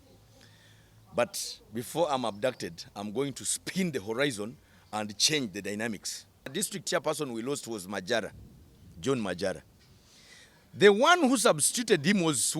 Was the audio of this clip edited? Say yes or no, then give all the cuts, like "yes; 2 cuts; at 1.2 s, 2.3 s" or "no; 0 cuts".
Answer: yes; 1 cut; at 6.5 s